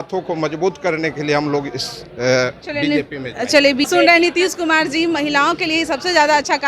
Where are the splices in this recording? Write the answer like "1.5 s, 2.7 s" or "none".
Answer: 3.9 s